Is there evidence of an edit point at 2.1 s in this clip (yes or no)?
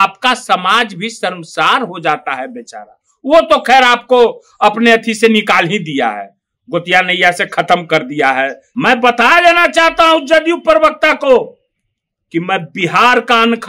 no